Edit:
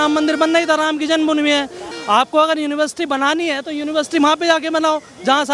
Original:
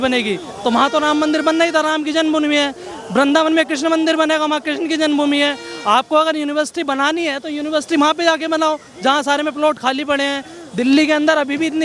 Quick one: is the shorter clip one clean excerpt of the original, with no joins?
no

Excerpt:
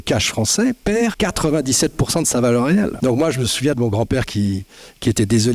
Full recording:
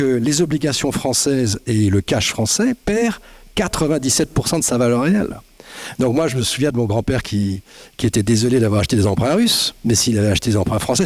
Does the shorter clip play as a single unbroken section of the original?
no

